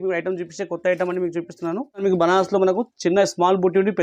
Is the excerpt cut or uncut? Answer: cut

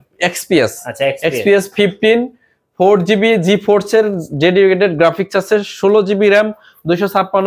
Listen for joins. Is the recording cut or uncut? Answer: uncut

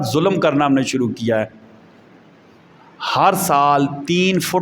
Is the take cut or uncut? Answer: uncut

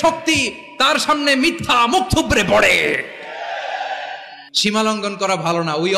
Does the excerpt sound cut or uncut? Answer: cut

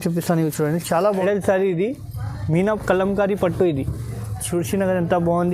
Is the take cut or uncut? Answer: cut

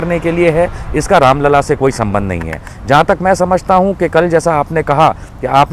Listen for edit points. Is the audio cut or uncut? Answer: uncut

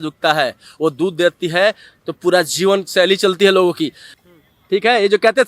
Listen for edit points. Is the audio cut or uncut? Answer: cut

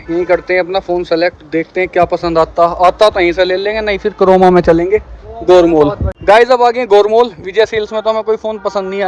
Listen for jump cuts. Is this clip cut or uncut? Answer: uncut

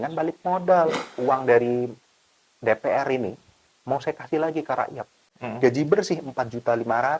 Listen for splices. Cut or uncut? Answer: cut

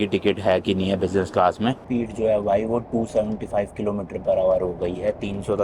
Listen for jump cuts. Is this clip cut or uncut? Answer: cut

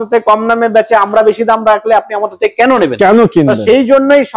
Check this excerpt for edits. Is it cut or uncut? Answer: uncut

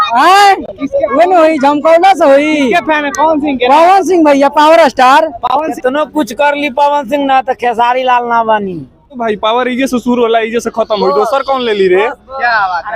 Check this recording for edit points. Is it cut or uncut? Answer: cut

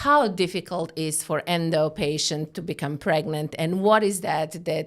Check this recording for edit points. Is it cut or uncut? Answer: uncut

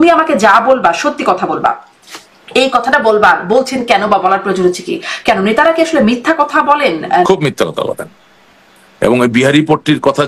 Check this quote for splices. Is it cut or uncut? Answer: cut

